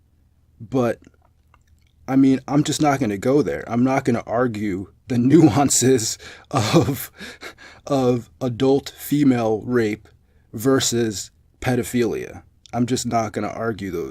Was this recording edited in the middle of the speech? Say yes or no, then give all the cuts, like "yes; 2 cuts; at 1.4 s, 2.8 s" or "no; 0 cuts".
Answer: no; 0 cuts